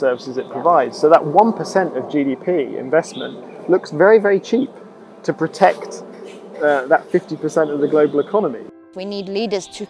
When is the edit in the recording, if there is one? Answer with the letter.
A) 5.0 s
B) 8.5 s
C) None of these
B